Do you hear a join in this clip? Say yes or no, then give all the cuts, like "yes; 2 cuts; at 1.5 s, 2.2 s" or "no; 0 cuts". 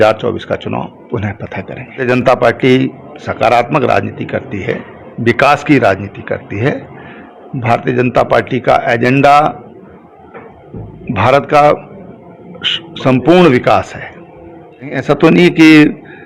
yes; 2 cuts; at 2.0 s, 15.0 s